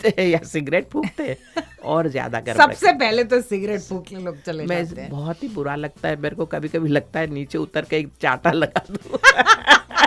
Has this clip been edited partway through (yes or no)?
no